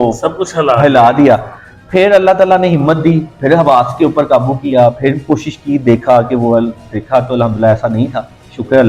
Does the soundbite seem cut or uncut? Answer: uncut